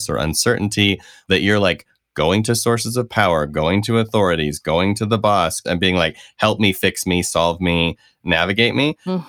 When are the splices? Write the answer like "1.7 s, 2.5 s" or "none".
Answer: 1.1 s, 5.6 s